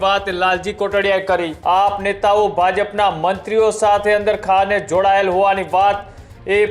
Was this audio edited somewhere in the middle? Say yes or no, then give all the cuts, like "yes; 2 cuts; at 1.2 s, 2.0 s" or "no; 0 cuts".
yes; 1 cut; at 1.5 s